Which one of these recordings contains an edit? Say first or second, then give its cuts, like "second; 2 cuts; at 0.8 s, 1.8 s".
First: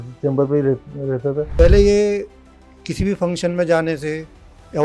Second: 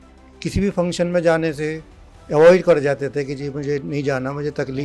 first; 1 cut; at 1.5 s